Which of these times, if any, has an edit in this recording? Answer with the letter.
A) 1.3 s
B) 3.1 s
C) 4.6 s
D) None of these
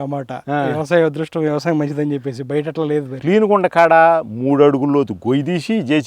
B